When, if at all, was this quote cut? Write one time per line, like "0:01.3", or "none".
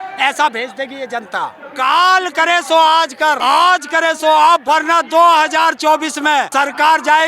0:01.6
0:03.4
0:04.6
0:06.5

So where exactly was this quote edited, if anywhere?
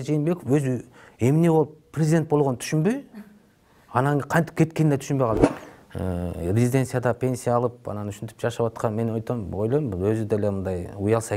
0:05.4

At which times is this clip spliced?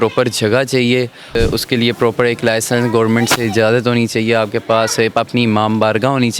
0:01.4

